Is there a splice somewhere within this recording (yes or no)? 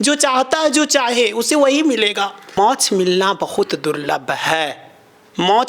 yes